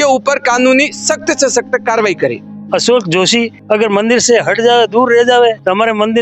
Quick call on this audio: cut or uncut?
cut